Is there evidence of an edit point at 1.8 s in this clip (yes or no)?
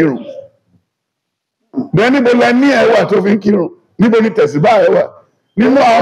no